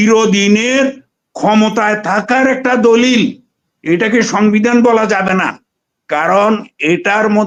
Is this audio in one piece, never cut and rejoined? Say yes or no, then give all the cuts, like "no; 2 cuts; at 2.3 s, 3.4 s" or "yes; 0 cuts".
yes; 0 cuts